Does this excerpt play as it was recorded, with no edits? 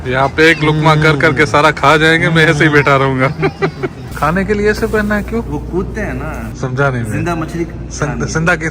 no; 2 cuts; at 4.0 s, 6.5 s

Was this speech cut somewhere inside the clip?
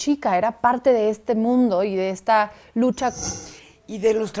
yes; 1 cut; at 3.2 s

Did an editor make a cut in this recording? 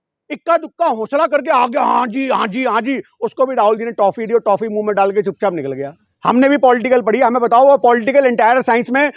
yes; 1 cut; at 6.1 s

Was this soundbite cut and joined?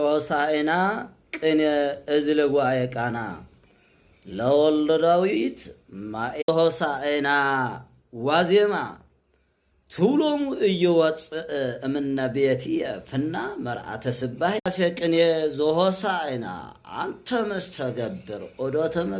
yes; 2 cuts; at 6.4 s, 14.6 s

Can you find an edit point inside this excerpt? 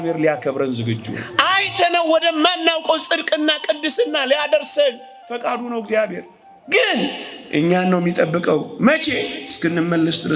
yes; 1 cut; at 1.2 s

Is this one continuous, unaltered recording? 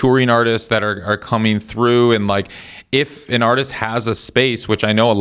yes; 0 cuts

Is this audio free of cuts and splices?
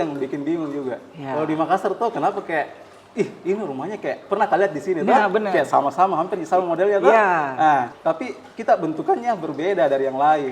no; 1 cut; at 7.9 s

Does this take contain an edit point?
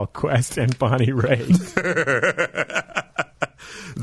no; 0 cuts

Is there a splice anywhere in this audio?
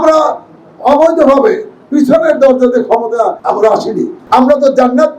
yes; 2 cuts; at 3.4 s, 4.2 s

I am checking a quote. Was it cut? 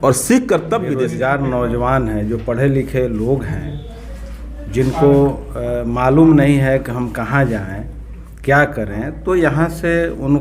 yes; 1 cut; at 0.9 s

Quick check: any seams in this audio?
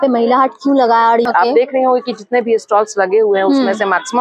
yes; 1 cut; at 1.2 s

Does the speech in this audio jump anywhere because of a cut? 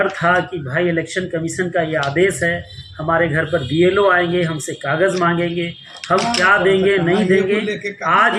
no; 0 cuts

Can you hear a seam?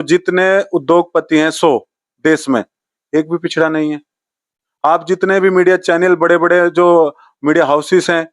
no; 0 cuts

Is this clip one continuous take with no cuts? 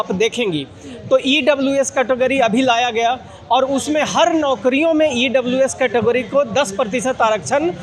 yes; 0 cuts

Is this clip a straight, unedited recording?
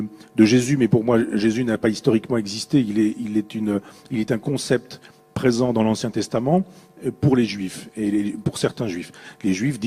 yes; 0 cuts

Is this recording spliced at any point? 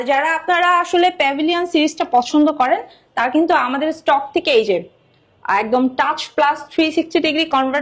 no; 0 cuts

